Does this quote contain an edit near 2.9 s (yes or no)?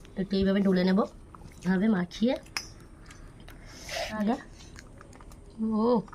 no